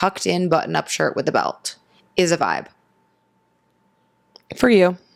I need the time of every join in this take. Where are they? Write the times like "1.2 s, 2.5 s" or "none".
none